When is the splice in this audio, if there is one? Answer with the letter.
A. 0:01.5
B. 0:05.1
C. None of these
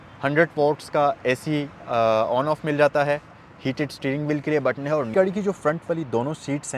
B